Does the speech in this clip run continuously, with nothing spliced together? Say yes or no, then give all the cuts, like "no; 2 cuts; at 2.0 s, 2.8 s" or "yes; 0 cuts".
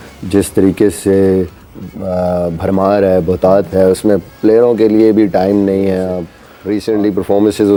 yes; 0 cuts